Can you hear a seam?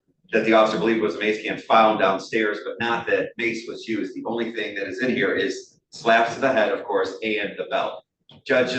no; 0 cuts

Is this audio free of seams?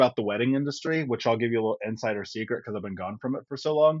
yes; 0 cuts

